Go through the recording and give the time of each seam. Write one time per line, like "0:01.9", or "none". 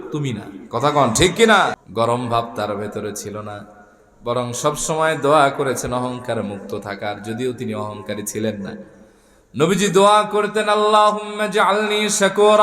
0:01.8

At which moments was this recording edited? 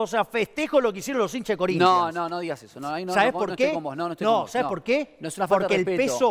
none

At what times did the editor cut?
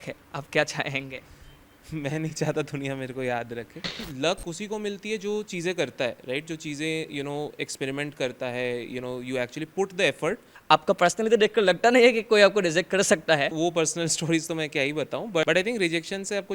0:04.0
0:10.5
0:13.5
0:15.4

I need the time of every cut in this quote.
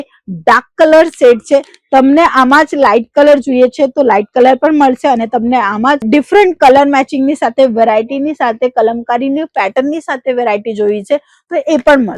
none

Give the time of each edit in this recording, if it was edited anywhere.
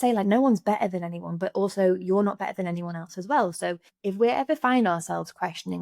0:03.9

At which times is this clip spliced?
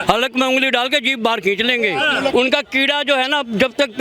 0:02.3

